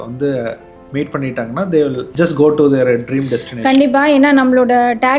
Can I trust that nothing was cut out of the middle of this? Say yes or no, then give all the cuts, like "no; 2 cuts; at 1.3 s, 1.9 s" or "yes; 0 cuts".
no; 1 cut; at 2.1 s